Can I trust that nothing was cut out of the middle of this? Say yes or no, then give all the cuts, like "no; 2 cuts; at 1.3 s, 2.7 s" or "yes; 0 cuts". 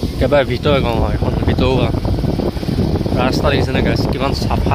yes; 0 cuts